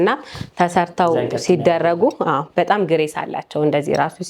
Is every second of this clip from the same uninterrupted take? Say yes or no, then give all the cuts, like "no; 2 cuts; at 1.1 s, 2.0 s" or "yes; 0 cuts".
yes; 0 cuts